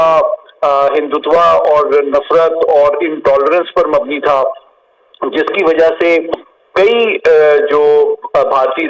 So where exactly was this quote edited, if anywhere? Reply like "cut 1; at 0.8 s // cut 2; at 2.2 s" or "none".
none